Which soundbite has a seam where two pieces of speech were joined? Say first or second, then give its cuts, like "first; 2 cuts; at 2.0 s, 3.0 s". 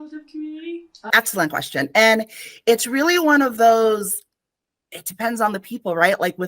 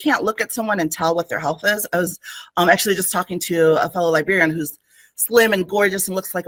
first; 1 cut; at 1.1 s